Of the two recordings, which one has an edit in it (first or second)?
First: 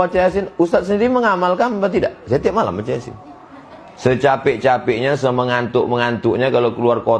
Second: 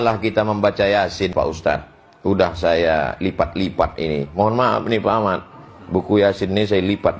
second